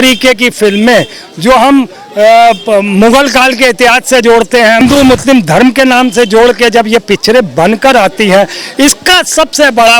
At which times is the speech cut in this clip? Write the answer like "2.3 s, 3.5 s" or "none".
4.8 s